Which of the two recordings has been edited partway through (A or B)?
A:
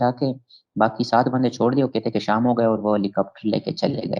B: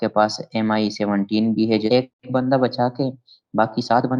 B